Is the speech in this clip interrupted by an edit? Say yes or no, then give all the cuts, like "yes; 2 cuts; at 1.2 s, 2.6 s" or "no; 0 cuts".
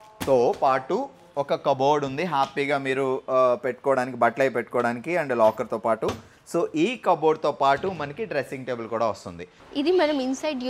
yes; 1 cut; at 9.6 s